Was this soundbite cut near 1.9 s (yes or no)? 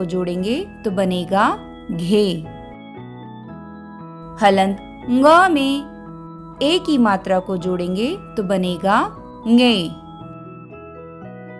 yes